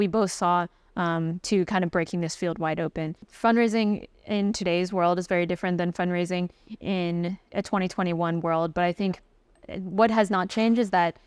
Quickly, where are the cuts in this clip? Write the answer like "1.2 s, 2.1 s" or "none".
3.2 s

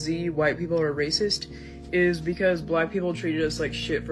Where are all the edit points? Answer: none

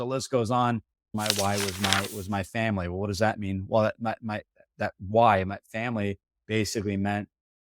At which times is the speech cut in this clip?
1.1 s

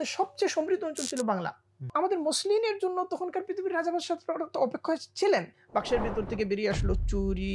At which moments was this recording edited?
1.9 s, 5.6 s

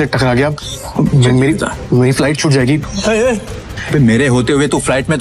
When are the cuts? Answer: 2.8 s, 3.7 s

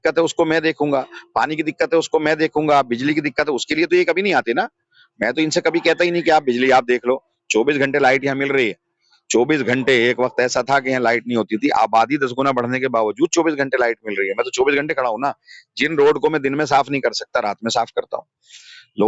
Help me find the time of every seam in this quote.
none

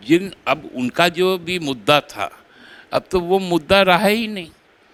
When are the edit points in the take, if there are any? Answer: none

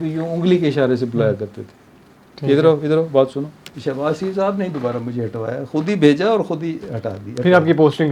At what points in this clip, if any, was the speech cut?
3.7 s

